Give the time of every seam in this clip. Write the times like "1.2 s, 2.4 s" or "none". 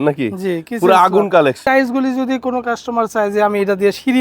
1.6 s